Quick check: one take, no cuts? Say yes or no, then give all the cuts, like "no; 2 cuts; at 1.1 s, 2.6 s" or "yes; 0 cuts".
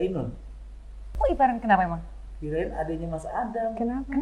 no; 1 cut; at 1.1 s